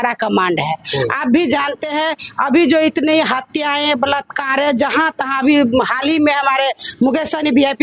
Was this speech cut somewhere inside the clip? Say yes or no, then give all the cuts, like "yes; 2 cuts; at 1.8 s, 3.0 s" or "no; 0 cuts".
no; 0 cuts